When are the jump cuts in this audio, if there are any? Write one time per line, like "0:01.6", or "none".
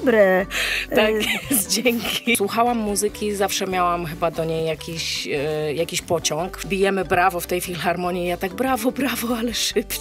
0:02.4
0:06.6